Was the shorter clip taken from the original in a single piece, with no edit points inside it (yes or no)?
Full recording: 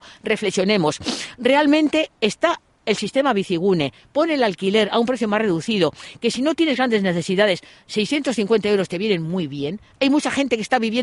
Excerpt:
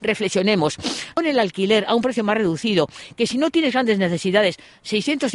no